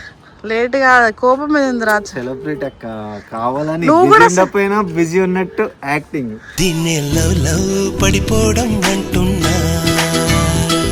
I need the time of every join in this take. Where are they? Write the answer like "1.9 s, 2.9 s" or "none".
none